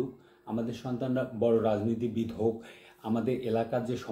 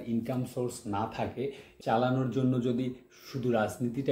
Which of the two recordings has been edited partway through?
second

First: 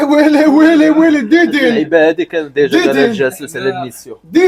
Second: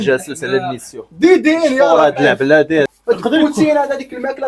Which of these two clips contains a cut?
second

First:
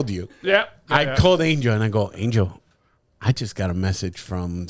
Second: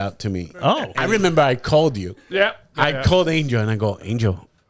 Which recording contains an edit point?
second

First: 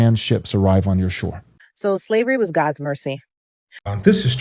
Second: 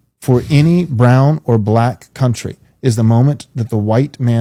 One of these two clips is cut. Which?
first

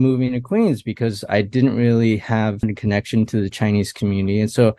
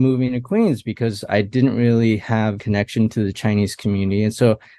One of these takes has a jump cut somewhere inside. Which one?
second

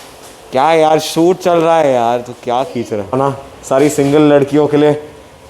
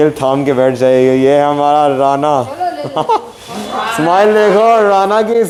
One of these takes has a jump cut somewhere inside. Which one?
first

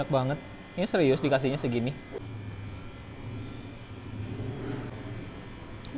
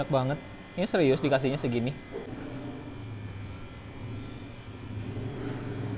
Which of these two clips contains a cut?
first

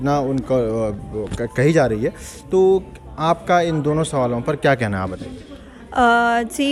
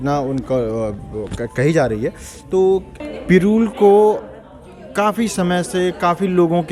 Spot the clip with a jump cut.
second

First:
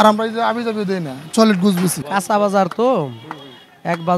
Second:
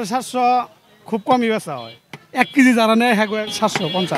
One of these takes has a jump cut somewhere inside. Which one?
first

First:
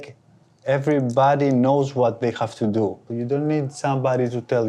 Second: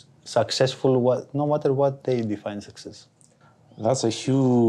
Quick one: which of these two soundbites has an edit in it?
first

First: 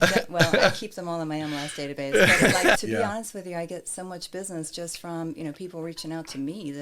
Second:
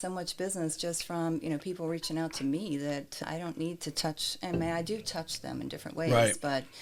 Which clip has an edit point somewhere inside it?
first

